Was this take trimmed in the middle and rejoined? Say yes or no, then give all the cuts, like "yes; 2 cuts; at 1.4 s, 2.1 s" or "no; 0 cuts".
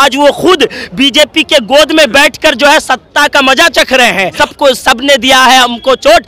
yes; 1 cut; at 4.3 s